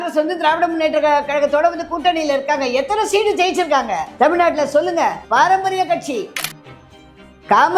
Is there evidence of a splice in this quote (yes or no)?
yes